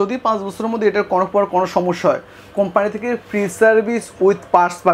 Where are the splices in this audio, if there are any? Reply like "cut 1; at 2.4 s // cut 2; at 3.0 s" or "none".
none